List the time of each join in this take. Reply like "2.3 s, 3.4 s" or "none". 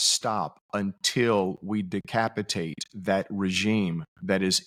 none